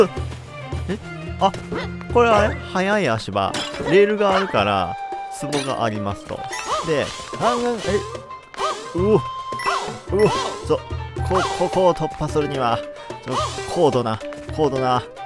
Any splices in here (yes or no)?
no